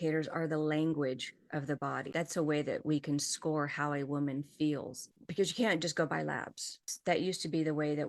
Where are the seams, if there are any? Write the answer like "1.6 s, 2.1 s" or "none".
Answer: 2.0 s